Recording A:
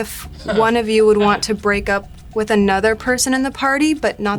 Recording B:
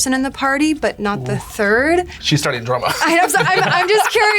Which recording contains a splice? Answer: B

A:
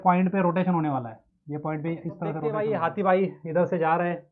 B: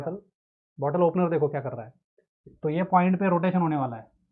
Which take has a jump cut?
A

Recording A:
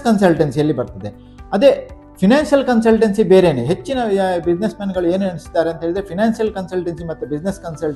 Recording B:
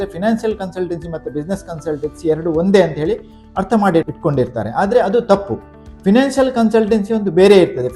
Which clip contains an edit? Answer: B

